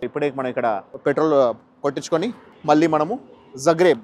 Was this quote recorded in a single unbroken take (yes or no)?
no